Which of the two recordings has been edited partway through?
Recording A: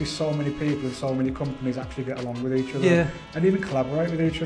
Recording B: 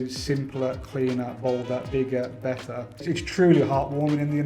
B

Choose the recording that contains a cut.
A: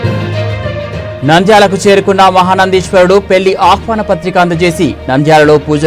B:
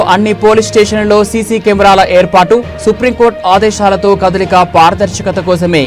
A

